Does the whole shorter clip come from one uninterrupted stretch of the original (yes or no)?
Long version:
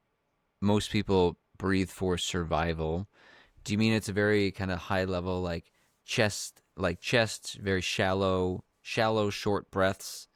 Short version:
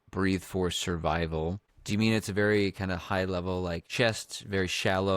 no